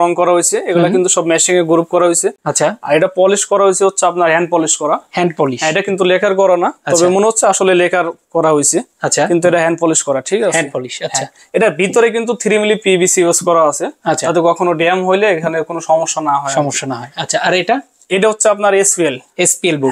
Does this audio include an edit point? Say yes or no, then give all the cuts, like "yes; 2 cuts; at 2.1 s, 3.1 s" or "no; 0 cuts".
no; 0 cuts